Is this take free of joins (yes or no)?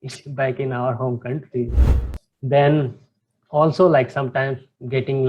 no